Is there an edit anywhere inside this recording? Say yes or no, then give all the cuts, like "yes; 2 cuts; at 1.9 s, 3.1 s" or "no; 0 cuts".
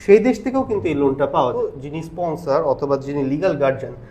yes; 1 cut; at 1.5 s